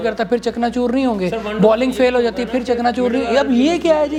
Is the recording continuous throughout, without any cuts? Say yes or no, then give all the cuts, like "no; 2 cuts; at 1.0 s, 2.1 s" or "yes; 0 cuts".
yes; 0 cuts